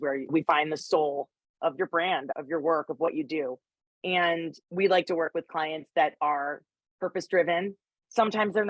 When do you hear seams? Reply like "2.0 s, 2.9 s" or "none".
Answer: none